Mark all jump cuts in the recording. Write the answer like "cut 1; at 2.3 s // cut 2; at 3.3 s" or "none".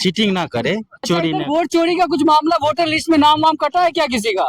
cut 1; at 1.1 s